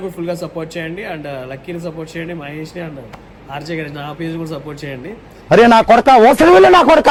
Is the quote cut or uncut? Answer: uncut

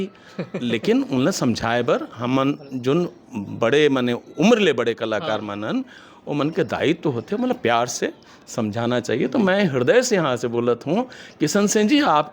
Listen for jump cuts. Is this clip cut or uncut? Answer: uncut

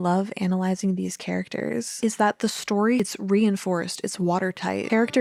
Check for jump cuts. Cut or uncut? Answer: uncut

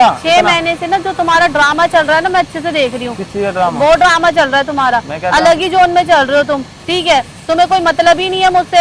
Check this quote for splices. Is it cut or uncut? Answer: uncut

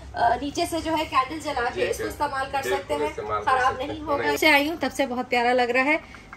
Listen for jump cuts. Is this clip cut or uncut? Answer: cut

